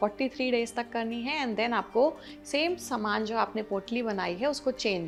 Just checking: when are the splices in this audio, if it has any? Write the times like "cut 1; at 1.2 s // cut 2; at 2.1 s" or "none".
none